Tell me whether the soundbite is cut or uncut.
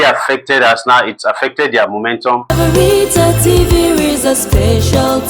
cut